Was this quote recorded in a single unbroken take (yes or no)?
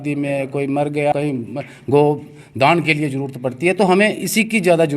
no